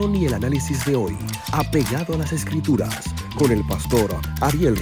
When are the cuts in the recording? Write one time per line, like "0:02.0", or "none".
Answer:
none